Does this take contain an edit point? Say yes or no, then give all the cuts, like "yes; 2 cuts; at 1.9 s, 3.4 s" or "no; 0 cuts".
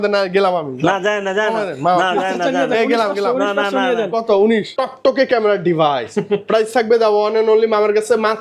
yes; 1 cut; at 4.7 s